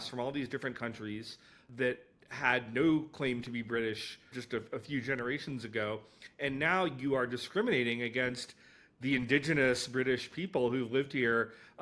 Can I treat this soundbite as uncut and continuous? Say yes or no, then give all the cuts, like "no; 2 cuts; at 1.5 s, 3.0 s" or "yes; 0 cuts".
no; 2 cuts; at 1.7 s, 4.3 s